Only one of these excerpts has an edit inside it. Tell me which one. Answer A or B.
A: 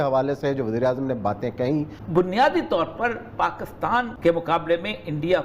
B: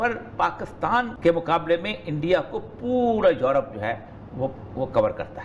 A